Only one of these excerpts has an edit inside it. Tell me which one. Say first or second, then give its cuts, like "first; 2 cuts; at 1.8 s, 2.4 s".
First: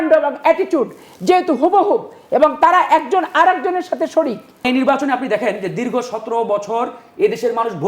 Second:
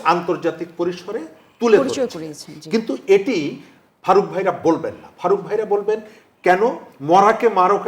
first; 1 cut; at 4.6 s